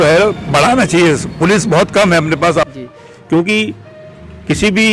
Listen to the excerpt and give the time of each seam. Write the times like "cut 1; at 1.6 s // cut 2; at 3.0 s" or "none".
cut 1; at 2.7 s